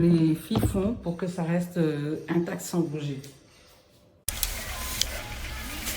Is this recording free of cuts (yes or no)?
no